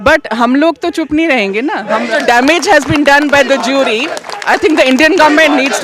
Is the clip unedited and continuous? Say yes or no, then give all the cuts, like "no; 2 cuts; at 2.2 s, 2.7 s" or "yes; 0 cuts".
no; 1 cut; at 2.1 s